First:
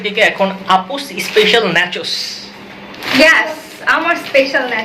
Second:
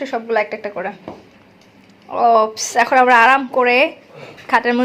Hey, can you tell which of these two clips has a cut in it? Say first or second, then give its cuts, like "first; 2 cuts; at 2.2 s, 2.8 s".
first; 1 cut; at 2.9 s